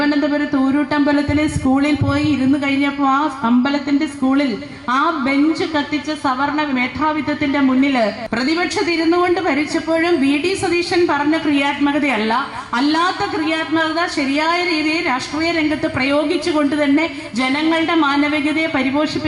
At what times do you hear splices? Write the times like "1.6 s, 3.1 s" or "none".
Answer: 8.2 s